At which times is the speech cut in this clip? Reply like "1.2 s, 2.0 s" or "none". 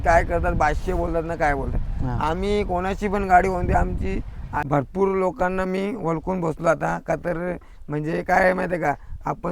4.5 s